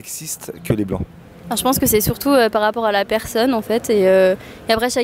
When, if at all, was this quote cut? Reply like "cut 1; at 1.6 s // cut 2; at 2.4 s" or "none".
none